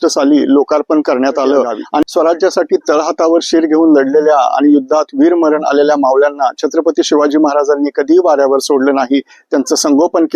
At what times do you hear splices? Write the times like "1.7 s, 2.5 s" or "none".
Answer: 2.0 s

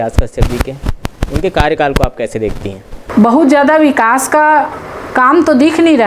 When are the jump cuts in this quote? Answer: 3.0 s

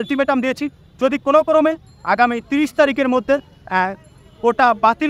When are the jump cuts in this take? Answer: none

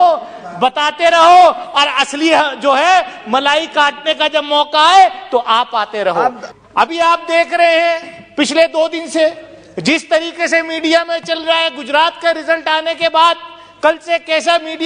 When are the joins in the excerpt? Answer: 6.5 s

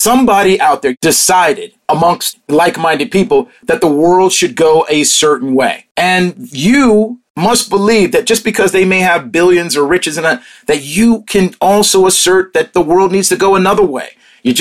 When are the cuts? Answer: 0.9 s, 2.1 s, 5.8 s, 7.2 s

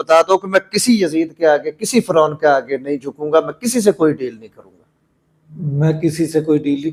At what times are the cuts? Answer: none

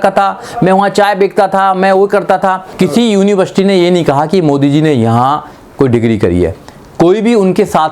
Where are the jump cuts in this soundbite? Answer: 2.7 s

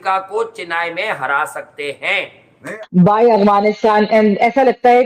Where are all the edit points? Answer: 2.8 s

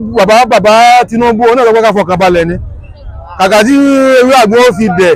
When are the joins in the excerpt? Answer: none

